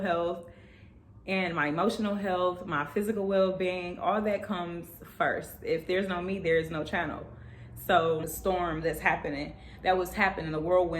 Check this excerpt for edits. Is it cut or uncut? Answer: cut